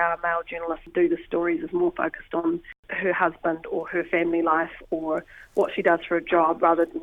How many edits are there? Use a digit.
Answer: 2